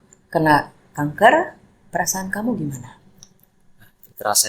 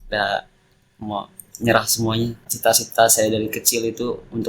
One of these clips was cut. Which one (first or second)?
second